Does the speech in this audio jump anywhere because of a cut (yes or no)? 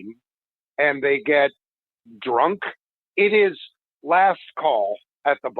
yes